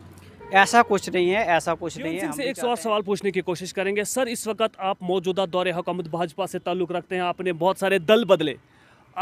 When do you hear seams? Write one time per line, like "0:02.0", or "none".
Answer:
0:02.3